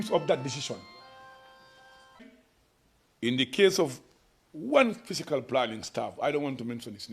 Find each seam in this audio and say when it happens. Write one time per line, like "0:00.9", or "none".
0:02.2

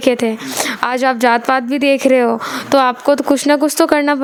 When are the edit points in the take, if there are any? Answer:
none

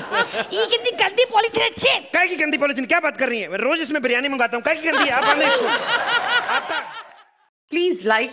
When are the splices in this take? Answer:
0:07.0

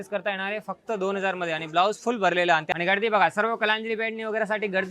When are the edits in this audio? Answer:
0:02.7

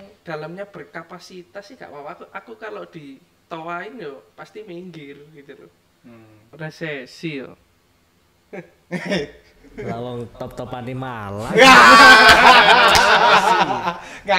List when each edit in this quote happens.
0:06.4

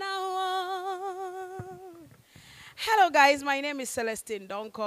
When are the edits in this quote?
none

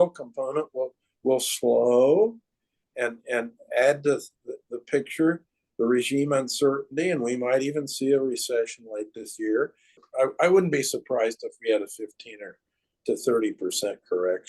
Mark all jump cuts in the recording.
0:10.0

